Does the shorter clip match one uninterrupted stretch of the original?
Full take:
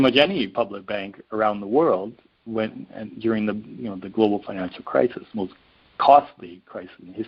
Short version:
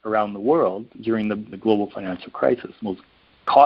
no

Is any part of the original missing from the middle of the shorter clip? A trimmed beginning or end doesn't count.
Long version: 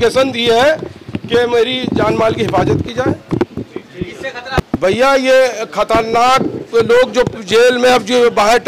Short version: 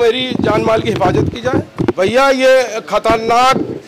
yes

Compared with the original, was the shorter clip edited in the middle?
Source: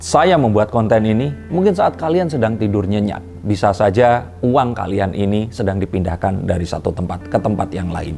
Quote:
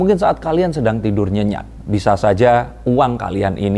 no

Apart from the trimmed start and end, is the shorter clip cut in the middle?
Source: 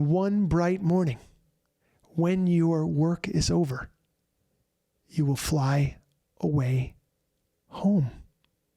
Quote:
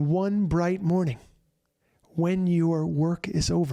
no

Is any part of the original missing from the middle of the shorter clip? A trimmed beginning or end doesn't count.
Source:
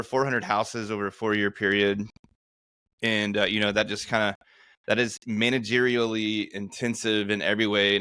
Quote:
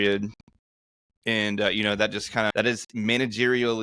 yes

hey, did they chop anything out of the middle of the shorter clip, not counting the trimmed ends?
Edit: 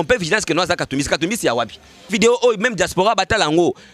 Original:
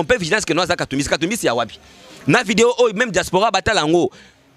yes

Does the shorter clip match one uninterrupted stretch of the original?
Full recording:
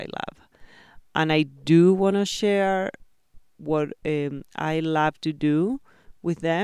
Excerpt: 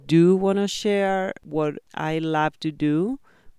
no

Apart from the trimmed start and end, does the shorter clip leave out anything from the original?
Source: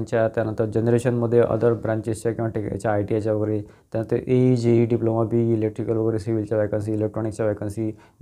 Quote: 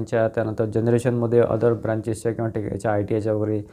no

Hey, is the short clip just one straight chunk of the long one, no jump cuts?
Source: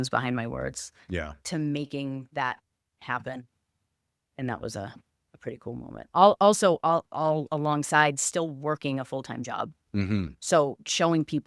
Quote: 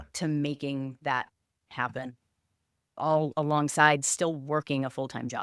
no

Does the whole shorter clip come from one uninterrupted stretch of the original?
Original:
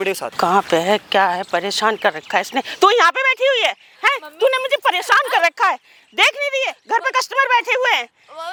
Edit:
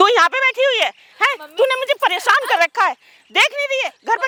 yes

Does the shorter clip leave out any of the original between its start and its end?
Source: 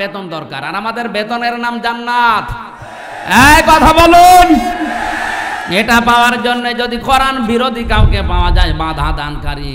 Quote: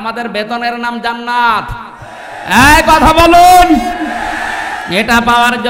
no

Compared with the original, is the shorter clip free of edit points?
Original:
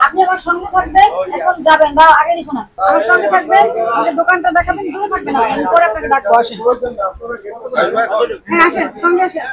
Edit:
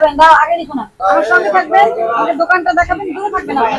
yes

